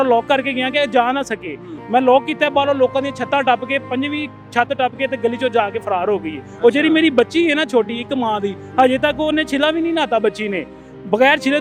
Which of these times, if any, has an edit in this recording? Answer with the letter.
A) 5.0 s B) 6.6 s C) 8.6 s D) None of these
D